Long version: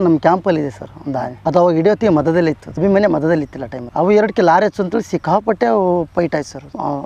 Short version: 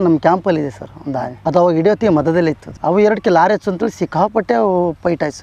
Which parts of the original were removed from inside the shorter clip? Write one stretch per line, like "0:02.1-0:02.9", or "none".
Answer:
0:02.7-0:03.8